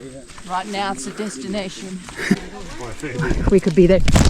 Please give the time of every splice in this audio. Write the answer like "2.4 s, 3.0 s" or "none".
2.4 s

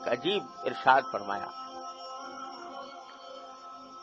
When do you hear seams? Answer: none

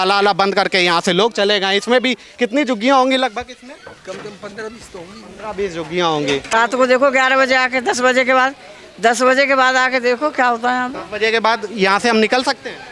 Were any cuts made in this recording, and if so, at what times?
6.5 s

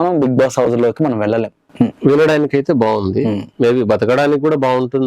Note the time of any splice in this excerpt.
1.6 s

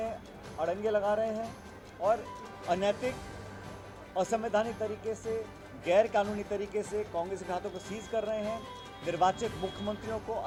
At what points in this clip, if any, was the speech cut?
none

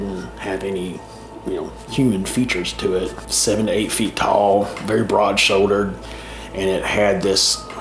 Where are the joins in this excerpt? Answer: 3.2 s

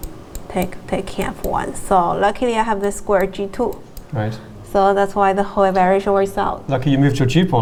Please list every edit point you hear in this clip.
none

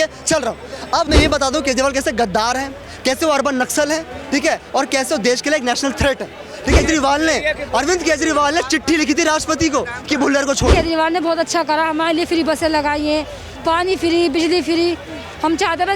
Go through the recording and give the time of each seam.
1.1 s, 6.8 s, 10.7 s

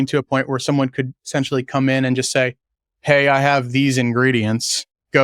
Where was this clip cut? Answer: none

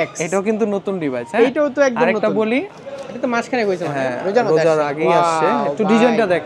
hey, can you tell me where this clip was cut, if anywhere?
2.7 s

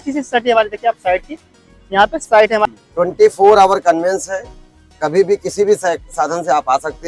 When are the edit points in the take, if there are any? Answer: 2.7 s

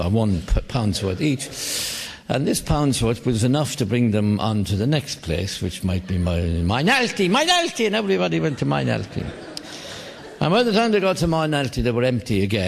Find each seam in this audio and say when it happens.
5.1 s

